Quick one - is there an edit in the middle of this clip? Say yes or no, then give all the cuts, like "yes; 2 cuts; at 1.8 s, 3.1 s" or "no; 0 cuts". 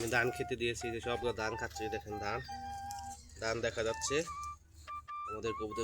no; 0 cuts